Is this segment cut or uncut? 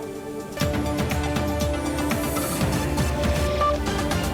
uncut